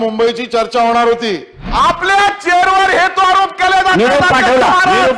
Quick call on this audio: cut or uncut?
cut